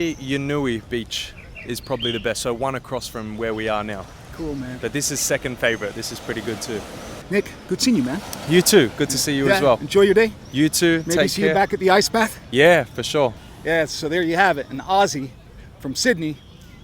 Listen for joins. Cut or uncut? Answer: uncut